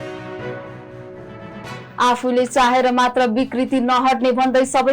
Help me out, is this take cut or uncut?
cut